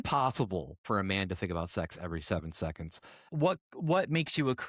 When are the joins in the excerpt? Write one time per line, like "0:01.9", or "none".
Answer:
0:00.8
0:03.2